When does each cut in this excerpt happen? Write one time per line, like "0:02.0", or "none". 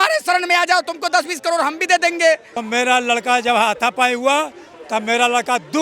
0:02.5